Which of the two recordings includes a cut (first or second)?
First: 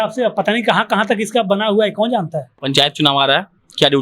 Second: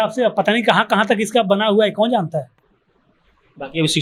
first